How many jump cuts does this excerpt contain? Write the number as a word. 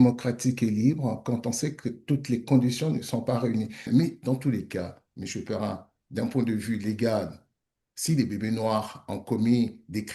one